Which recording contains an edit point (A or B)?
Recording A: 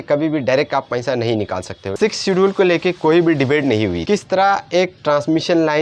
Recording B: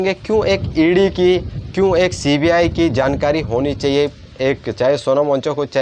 A